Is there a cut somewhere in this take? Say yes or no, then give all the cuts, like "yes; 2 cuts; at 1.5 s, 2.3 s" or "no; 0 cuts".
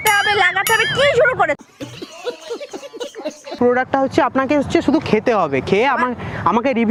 no; 0 cuts